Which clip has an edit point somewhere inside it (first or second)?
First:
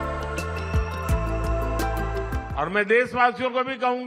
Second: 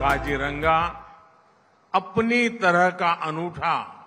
first